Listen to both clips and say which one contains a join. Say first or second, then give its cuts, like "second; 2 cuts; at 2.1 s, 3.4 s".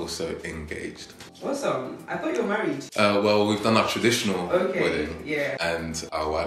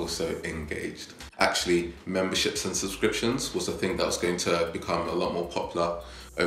second; 1 cut; at 1.2 s